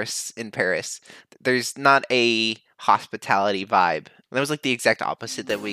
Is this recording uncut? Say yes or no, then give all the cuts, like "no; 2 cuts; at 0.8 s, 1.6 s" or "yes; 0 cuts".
yes; 0 cuts